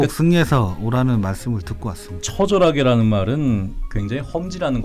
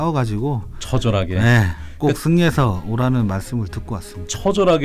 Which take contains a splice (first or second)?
first